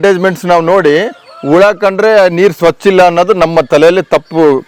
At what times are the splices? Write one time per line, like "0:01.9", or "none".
none

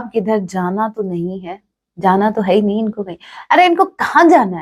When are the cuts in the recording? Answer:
none

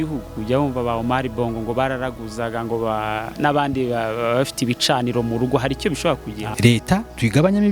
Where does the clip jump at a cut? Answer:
0:06.4

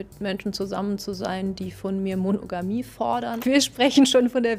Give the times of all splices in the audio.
0:03.4

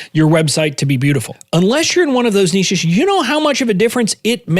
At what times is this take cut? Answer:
0:01.3

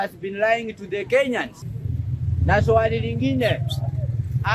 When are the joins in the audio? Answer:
0:01.7

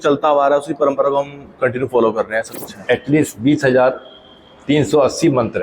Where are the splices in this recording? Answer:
0:02.8

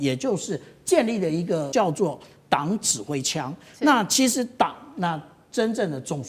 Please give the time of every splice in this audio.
0:01.7

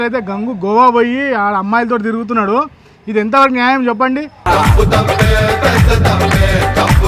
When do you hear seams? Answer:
none

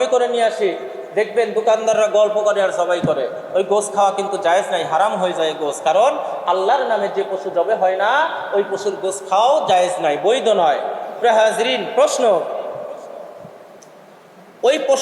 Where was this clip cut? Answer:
0:11.9

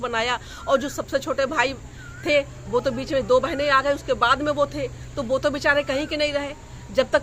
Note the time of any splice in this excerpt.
none

